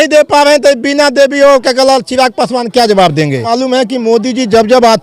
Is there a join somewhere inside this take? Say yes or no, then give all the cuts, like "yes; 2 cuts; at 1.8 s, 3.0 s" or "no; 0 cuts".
yes; 1 cut; at 3.5 s